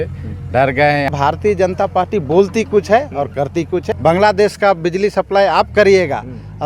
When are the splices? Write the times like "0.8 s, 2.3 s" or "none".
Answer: 1.1 s, 3.9 s